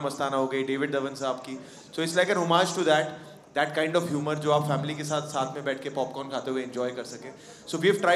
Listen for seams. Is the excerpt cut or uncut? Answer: uncut